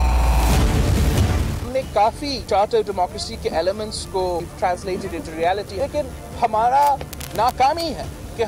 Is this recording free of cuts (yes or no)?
yes